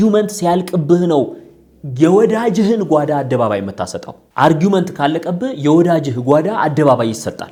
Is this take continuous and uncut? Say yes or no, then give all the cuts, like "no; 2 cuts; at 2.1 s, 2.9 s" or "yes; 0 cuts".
yes; 0 cuts